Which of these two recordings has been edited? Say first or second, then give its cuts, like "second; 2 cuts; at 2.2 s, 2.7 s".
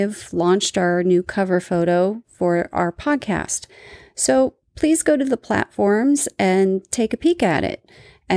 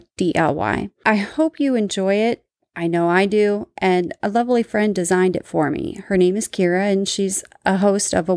second; 1 cut; at 0.9 s